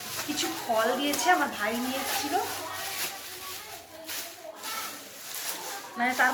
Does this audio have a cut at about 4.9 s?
no; 0 cuts

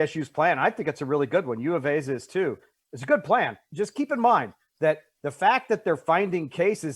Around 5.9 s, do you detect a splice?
no; 0 cuts

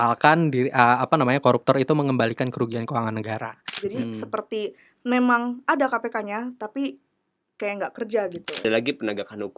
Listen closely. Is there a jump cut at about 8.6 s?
yes; 2 cuts; at 3.7 s, 8.6 s

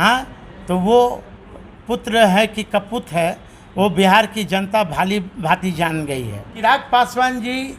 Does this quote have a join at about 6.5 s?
yes; 1 cut; at 6.5 s

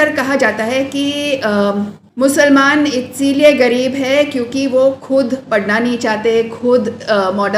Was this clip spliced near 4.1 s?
no; 1 cut; at 2.0 s

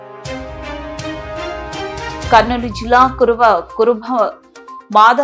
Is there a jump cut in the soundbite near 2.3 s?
no; 0 cuts

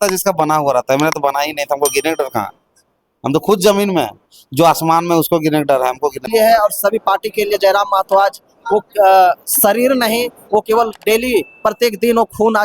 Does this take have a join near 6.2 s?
yes; 1 cut; at 6.2 s

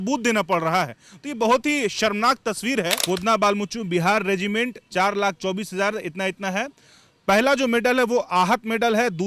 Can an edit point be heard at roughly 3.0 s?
yes; 1 cut; at 3.0 s

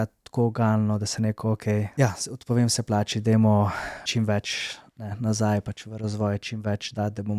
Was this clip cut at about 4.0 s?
yes; 2 cuts; at 1.9 s, 4.0 s

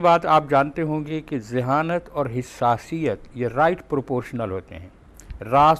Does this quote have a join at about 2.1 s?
no; 0 cuts

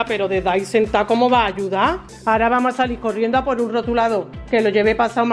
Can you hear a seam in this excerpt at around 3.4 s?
no; 1 cut; at 2.1 s

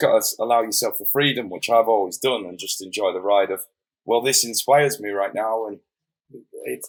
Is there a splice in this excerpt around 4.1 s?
no; 0 cuts

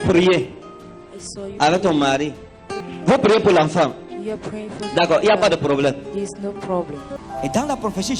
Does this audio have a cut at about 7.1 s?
yes; 2 cuts; at 2.9 s, 7.1 s

